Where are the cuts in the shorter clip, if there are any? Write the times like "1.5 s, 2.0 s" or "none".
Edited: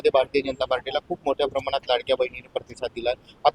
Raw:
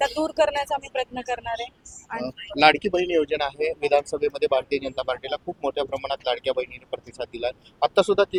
none